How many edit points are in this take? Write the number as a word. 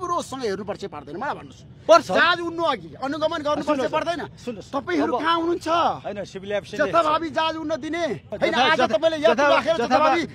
one